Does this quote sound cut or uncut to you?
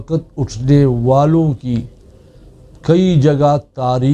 uncut